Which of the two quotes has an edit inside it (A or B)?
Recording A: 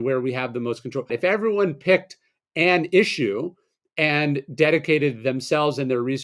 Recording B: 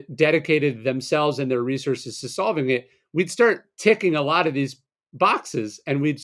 A